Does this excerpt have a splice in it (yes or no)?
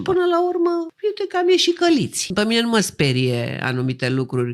yes